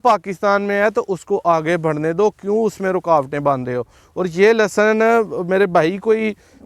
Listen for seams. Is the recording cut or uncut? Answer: uncut